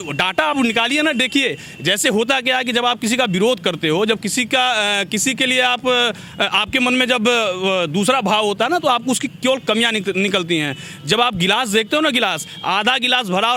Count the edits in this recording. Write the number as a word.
zero